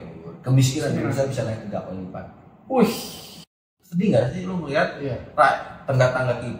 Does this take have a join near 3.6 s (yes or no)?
yes